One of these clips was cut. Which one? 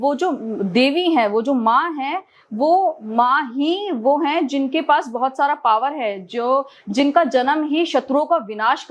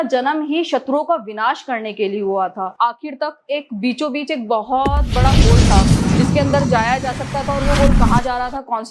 second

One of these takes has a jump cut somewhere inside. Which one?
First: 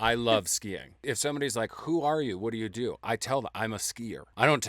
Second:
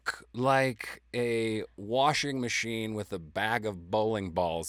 first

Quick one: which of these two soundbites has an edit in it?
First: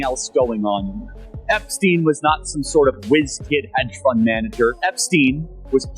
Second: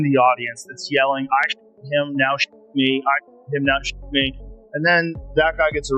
first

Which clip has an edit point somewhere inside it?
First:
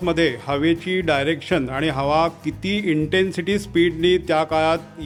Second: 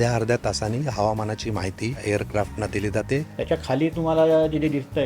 second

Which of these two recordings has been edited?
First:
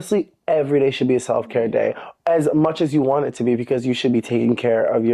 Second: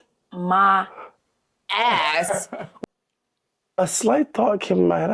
second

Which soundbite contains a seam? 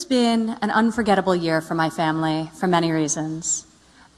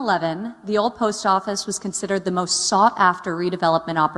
second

